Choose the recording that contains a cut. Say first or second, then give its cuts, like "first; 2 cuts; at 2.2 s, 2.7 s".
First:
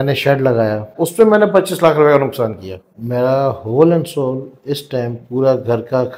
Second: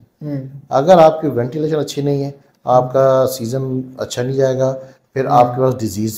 first; 2 cuts; at 1.0 s, 2.9 s